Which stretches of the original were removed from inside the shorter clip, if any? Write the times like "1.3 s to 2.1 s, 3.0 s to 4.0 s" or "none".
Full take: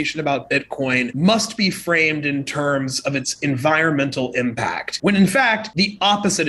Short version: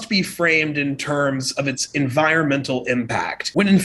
none

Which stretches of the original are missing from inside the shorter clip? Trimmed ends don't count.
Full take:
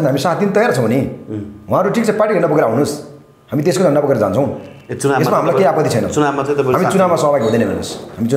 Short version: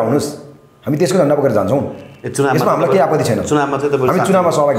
none

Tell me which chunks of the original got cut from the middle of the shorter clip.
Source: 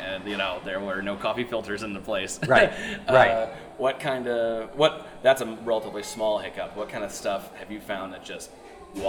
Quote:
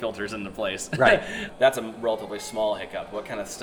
2.9 s to 5.1 s

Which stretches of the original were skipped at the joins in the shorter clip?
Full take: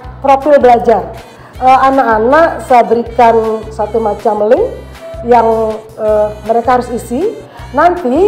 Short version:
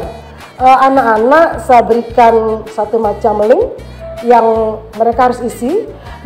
5.9 s to 6.4 s

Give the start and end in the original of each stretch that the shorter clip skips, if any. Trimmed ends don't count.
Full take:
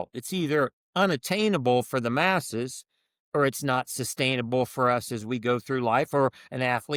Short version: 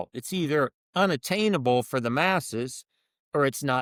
none

